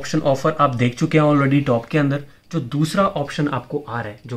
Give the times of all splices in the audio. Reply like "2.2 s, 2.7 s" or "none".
none

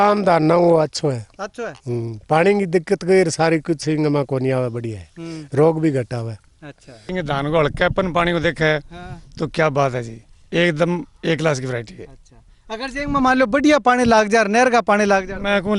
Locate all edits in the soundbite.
7.1 s

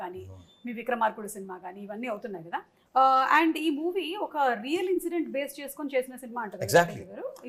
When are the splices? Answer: 2.7 s

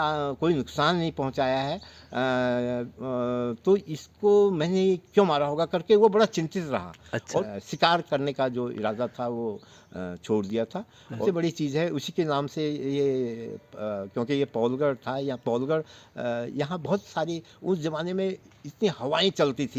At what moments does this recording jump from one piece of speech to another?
7.4 s, 11.2 s

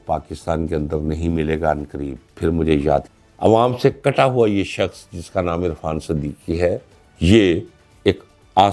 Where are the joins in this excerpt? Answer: 3.1 s

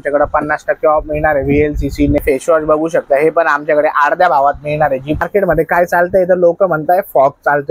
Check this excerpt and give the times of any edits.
2.2 s, 5.2 s

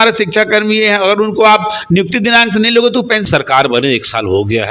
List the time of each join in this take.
3.2 s

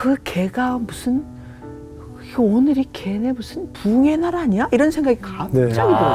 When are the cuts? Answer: none

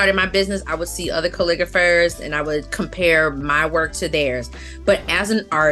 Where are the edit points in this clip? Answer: none

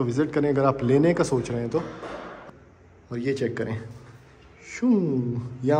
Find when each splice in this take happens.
2.3 s

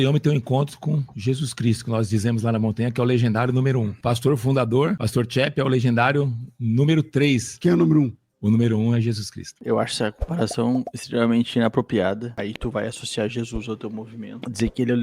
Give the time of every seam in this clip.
3.9 s, 5.0 s, 7.5 s, 9.5 s

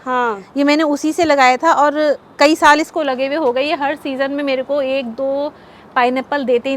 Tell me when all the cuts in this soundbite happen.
none

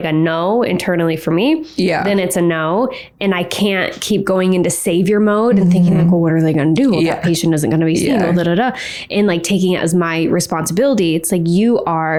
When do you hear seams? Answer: none

